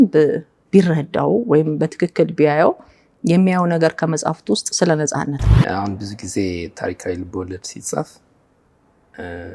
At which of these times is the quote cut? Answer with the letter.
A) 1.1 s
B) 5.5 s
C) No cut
B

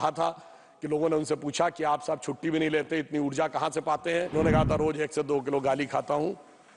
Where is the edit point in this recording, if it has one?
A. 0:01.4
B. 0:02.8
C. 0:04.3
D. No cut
C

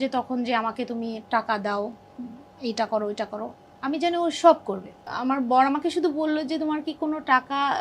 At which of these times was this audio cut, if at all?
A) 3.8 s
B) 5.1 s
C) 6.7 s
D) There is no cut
B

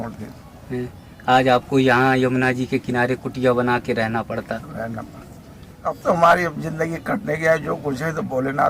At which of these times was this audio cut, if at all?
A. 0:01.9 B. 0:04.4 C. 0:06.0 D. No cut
C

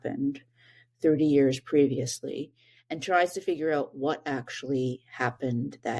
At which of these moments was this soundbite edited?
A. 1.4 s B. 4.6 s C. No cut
C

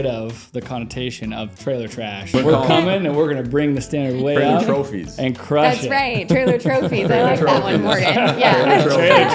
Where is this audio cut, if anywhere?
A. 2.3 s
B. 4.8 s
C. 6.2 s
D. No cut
A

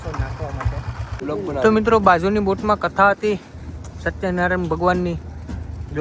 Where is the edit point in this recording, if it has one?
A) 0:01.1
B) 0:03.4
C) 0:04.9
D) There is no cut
A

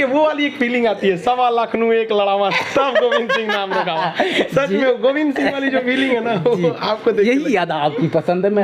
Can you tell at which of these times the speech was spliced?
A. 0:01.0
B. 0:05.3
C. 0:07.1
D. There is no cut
D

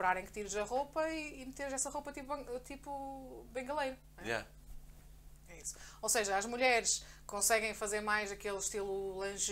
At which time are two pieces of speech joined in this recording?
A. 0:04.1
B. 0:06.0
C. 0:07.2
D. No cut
D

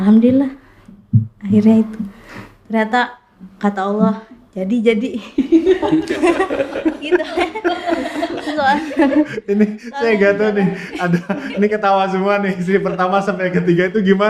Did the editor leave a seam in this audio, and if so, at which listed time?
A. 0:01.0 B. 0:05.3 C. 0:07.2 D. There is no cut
D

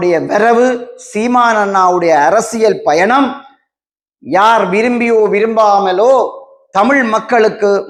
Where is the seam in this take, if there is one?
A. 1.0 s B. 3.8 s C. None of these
C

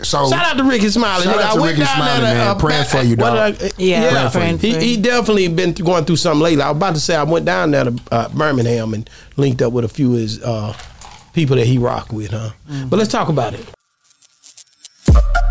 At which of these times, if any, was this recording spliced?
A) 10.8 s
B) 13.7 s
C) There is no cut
B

